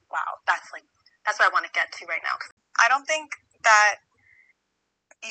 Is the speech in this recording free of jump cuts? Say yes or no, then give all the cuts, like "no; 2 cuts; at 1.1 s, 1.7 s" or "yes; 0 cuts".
no; 1 cut; at 2.5 s